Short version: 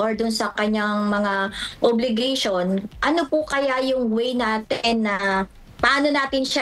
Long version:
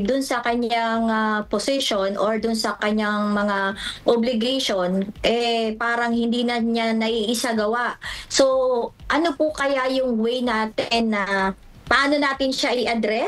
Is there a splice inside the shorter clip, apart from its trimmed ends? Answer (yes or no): yes